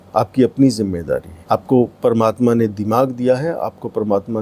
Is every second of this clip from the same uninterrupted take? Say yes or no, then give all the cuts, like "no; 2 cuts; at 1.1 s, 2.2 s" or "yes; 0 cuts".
no; 1 cut; at 1.3 s